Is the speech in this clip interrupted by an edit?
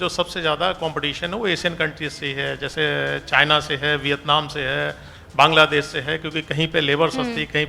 no; 0 cuts

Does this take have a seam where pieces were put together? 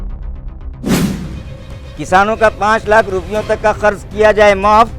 no; 0 cuts

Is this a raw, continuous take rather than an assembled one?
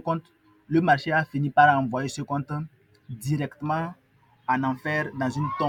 yes; 0 cuts

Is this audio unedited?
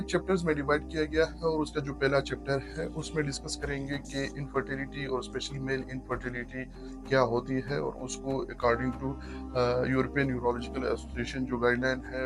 yes; 0 cuts

